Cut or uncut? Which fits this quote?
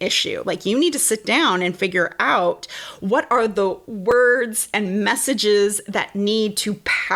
uncut